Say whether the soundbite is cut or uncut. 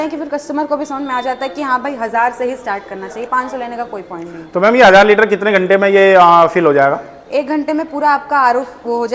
uncut